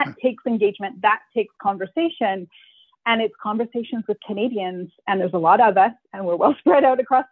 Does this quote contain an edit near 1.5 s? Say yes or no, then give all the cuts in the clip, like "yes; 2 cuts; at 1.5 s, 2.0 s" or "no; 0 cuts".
no; 0 cuts